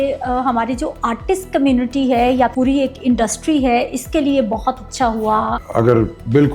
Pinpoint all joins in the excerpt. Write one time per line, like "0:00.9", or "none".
0:02.5
0:05.6